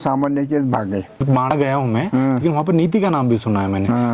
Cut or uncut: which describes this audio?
cut